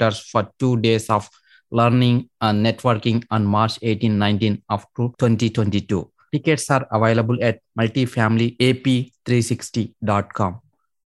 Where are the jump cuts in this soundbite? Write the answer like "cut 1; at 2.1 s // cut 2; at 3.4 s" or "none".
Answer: cut 1; at 5.1 s